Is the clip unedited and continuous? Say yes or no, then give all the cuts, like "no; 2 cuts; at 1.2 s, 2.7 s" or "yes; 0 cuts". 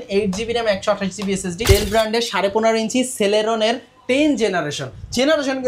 no; 1 cut; at 1.6 s